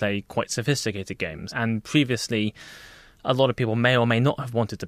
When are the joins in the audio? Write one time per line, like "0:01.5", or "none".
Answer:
0:01.4